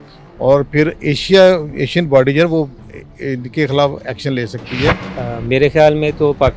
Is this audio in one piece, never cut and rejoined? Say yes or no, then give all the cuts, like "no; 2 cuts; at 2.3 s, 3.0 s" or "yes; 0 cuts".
no; 1 cut; at 5.1 s